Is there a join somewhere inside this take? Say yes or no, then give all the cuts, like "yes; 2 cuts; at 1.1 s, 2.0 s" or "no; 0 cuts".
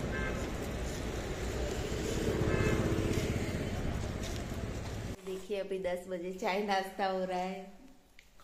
yes; 1 cut; at 5.1 s